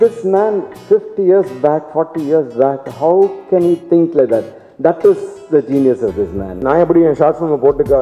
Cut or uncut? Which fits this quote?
cut